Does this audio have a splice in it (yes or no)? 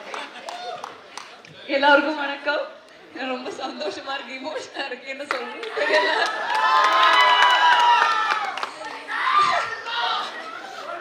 no